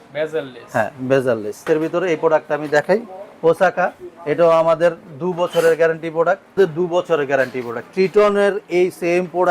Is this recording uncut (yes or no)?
no